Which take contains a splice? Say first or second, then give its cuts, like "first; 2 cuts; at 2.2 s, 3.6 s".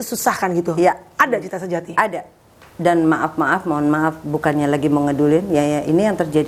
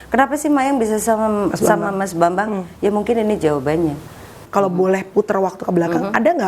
second; 1 cut; at 4.4 s